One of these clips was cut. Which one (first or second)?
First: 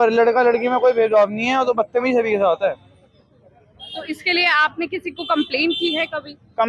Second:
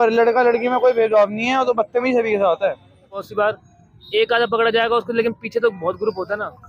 second